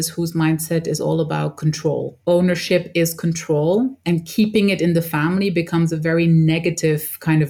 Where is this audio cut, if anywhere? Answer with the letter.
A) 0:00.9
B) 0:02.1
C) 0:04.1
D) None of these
B